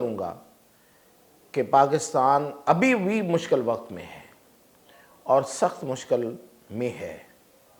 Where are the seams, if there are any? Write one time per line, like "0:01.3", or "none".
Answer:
none